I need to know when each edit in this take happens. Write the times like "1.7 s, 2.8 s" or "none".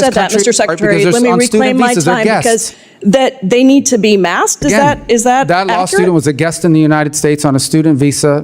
2.7 s